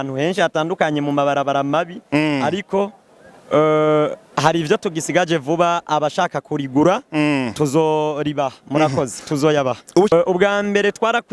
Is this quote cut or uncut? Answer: cut